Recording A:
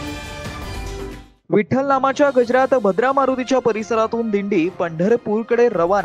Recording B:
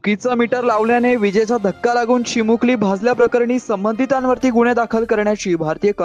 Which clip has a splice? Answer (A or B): A